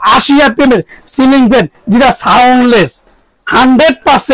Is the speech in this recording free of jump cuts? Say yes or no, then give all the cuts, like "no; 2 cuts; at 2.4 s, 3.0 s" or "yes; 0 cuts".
yes; 0 cuts